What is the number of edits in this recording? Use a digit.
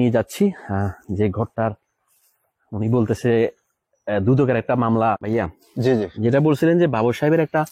1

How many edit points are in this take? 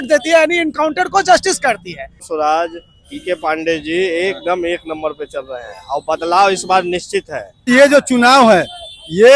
2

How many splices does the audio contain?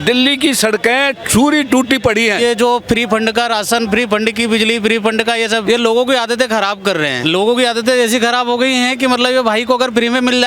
3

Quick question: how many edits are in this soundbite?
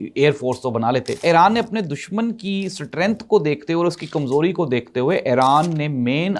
1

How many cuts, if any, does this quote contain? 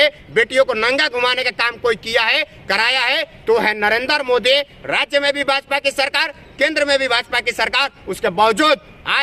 0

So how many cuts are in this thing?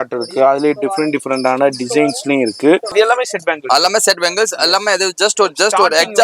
1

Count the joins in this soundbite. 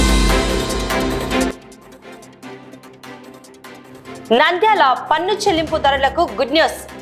2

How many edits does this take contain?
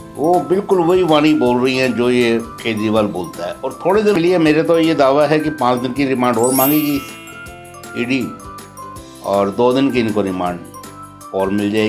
1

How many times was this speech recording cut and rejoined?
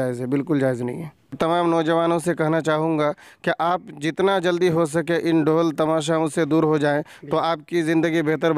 1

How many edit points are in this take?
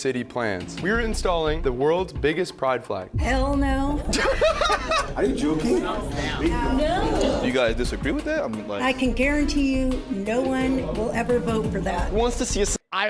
1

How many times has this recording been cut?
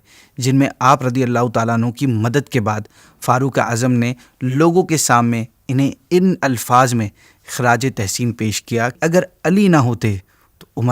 1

